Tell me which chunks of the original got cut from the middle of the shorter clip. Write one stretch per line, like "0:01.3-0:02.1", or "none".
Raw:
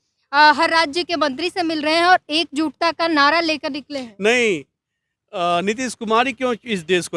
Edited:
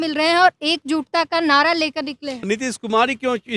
0:04.1-0:05.6